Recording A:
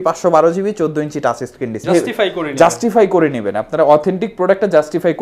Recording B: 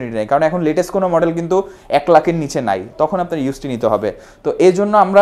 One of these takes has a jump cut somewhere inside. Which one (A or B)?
A